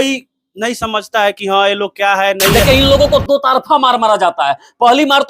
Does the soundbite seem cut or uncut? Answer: cut